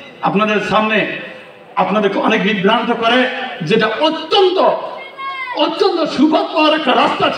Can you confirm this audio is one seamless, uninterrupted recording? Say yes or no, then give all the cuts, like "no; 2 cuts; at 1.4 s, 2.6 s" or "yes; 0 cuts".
yes; 0 cuts